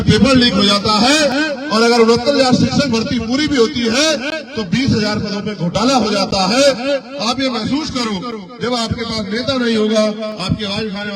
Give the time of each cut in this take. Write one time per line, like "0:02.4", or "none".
none